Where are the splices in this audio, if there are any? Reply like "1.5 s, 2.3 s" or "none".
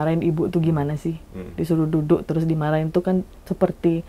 none